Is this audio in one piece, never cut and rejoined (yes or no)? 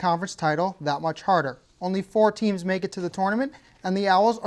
yes